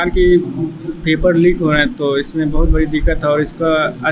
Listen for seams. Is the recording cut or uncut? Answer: uncut